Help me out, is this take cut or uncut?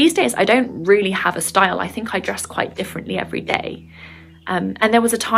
uncut